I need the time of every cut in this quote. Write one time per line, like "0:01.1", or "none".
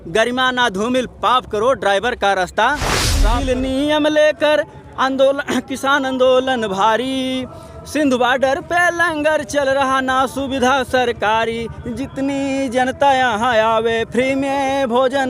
0:03.2